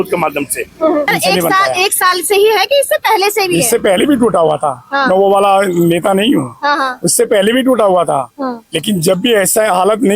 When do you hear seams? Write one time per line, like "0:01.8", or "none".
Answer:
0:01.1